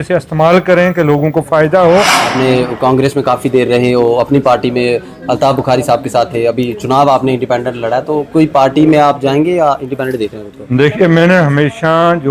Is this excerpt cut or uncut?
cut